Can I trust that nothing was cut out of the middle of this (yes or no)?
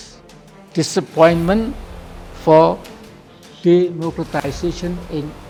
yes